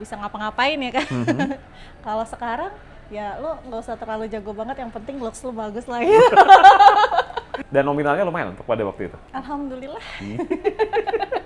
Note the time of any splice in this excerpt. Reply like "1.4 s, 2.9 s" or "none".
7.4 s, 9.2 s